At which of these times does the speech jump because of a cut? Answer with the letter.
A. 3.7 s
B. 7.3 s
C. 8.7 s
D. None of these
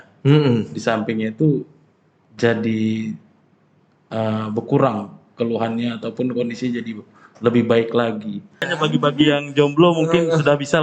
C